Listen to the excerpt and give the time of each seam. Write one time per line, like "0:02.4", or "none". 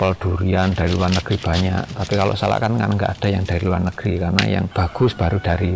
0:04.7